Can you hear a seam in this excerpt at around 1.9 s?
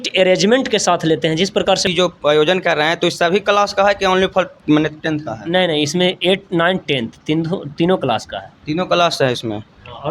yes; 1 cut; at 1.9 s

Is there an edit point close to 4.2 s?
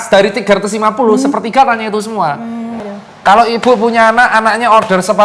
no; 1 cut; at 2.8 s

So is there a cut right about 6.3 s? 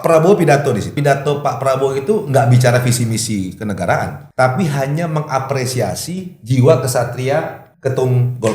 no; 3 cuts; at 0.9 s, 4.2 s, 7.6 s

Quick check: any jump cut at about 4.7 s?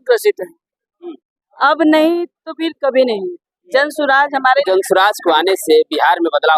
yes; 1 cut; at 4.7 s

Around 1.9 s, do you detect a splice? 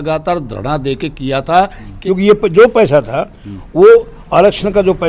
yes; 1 cut; at 1.9 s

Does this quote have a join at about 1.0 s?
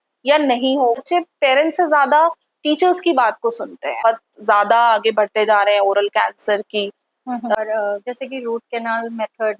yes; 3 cuts; at 1.0 s, 4.0 s, 7.5 s

